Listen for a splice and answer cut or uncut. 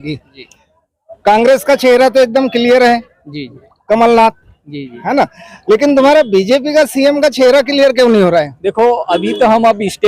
uncut